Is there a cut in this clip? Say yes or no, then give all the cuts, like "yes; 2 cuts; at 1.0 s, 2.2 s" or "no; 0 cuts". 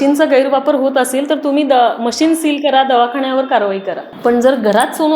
yes; 1 cut; at 4.0 s